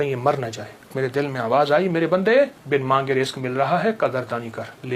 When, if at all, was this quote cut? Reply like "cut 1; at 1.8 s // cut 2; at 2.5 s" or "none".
cut 1; at 0.9 s // cut 2; at 2.6 s

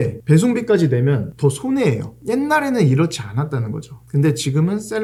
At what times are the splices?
none

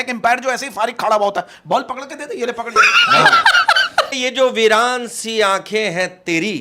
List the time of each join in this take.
cut 1; at 4.2 s

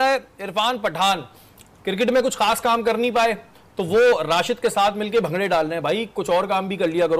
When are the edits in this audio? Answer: none

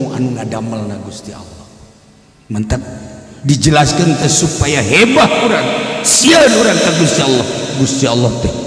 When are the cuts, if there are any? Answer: none

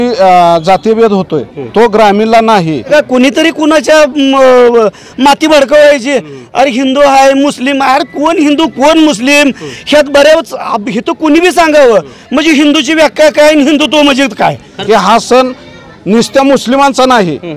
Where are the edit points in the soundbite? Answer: cut 1; at 2.9 s // cut 2; at 14.7 s

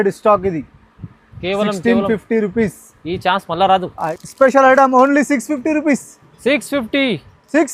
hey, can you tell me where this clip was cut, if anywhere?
cut 1; at 4.0 s

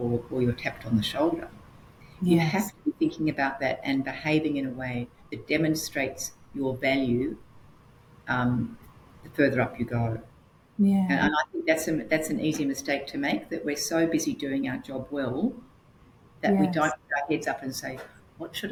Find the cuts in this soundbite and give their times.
none

